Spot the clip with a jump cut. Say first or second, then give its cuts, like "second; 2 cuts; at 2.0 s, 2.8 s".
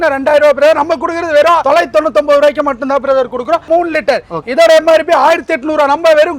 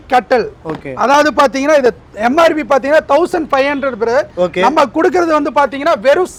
first; 2 cuts; at 1.6 s, 3.7 s